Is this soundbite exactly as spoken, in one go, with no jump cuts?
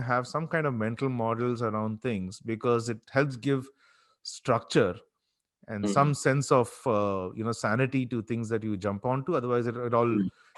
yes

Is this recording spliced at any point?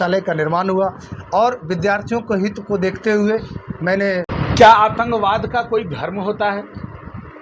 yes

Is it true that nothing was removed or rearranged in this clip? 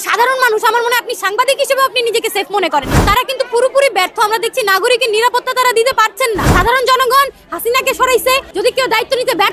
no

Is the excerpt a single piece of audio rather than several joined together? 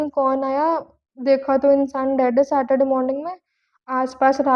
yes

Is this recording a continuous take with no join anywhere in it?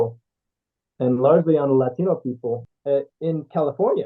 no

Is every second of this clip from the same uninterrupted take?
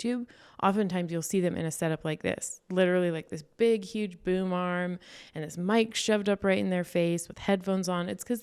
yes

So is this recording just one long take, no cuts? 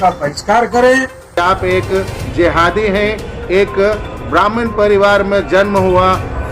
no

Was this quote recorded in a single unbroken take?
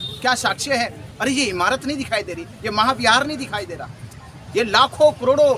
yes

